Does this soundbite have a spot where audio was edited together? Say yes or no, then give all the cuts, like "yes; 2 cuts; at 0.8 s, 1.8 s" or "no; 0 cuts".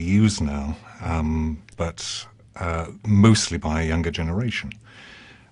no; 0 cuts